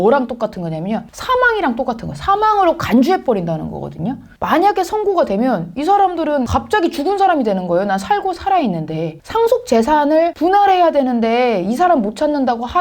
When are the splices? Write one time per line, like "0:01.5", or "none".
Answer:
0:04.3
0:06.5
0:09.2